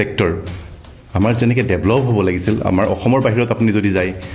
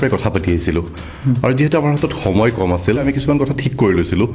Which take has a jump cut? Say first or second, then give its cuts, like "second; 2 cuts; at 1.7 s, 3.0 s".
second; 1 cut; at 3.0 s